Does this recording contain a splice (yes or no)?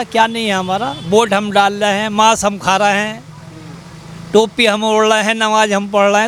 no